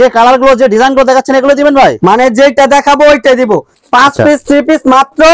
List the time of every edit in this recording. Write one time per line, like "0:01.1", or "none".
0:03.7